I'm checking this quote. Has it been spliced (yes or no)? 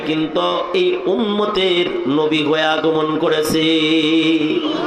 no